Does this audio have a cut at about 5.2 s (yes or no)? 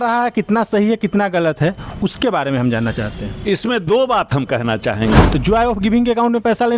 yes